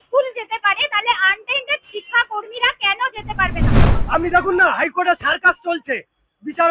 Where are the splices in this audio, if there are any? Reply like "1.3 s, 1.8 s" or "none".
3.9 s